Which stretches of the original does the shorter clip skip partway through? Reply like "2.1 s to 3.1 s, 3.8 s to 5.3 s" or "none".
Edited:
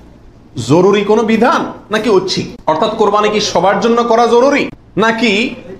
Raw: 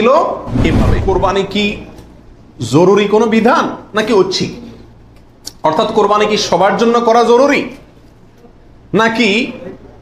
4.5 s to 5.5 s, 7.8 s to 8.8 s